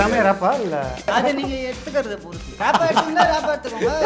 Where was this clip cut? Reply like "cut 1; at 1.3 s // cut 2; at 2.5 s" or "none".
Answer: cut 1; at 1.1 s // cut 2; at 2.6 s